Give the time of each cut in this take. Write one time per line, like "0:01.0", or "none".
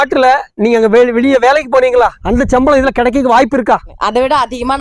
0:02.2
0:04.0